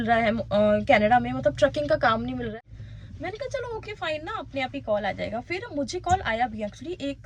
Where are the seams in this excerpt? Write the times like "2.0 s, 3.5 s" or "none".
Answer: 2.5 s

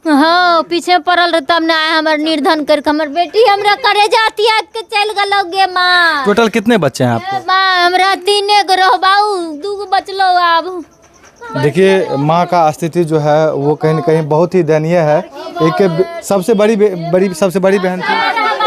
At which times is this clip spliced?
none

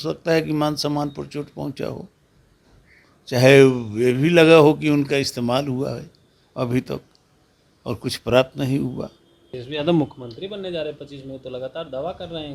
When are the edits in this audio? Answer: 9.5 s

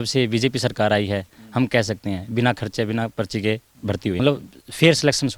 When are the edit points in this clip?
4.2 s

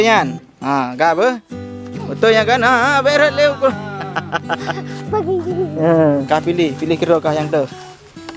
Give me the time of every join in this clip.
6.2 s

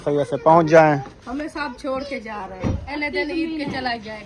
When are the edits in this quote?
1.2 s, 2.9 s

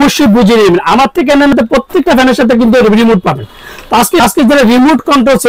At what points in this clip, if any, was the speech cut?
1.5 s, 4.2 s

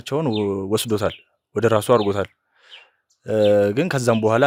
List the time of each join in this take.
none

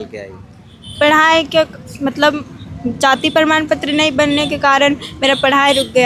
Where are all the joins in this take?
none

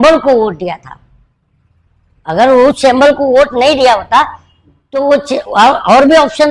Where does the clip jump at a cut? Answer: none

